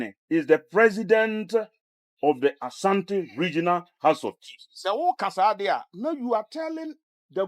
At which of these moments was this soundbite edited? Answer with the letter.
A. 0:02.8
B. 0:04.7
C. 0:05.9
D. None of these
B